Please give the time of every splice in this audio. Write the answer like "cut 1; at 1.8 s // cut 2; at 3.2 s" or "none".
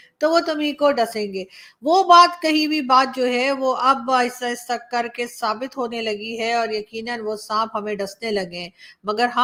none